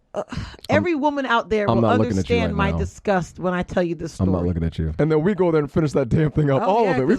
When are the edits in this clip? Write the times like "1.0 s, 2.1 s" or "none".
4.8 s